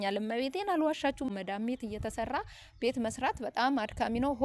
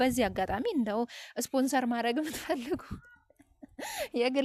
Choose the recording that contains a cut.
first; 1 cut; at 1.3 s

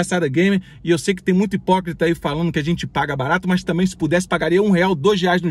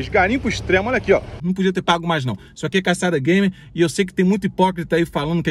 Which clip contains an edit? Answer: second; 1 cut; at 1.4 s

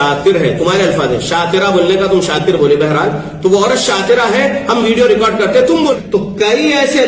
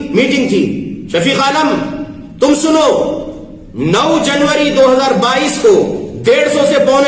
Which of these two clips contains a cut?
first; 1 cut; at 5.9 s

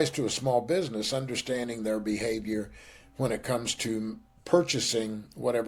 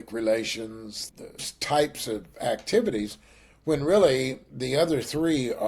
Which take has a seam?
second; 1 cut; at 1.5 s

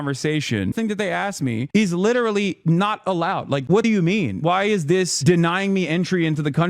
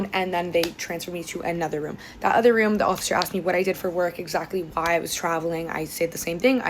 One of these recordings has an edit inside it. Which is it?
first; 2 cuts; at 0.7 s, 3.8 s

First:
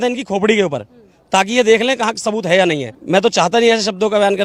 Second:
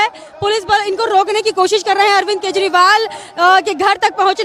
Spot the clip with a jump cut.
first; 1 cut; at 2.9 s

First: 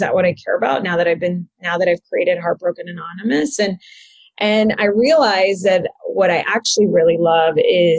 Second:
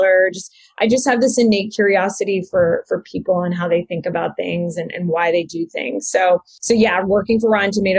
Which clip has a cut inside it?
second; 1 cut; at 6.5 s

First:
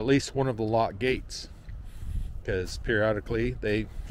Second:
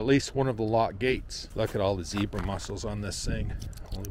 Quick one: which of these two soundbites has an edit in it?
second; 1 cut; at 1.4 s

